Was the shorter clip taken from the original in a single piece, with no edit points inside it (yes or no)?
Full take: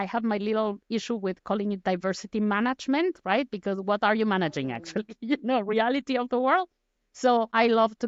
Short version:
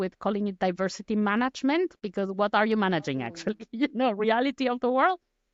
no